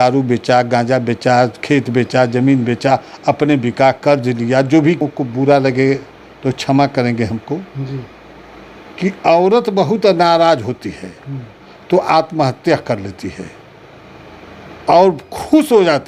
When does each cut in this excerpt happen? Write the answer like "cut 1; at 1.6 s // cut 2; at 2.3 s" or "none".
cut 1; at 5.0 s